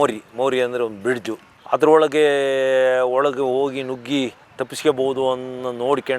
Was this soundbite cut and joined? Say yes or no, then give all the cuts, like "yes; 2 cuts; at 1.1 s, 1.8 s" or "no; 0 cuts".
yes; 1 cut; at 1.5 s